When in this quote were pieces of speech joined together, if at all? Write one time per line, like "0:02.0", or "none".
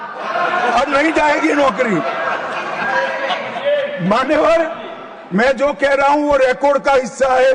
none